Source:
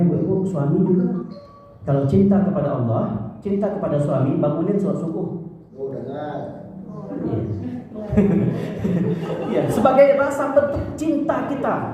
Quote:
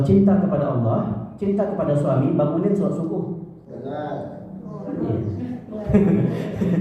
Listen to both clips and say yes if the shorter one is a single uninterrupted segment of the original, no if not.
no